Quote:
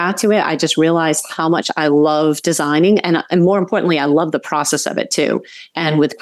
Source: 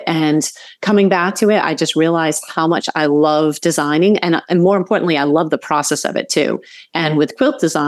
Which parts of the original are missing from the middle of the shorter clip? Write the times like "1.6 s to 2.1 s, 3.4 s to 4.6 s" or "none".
none